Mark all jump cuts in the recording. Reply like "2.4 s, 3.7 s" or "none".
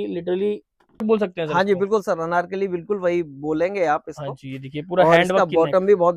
1.0 s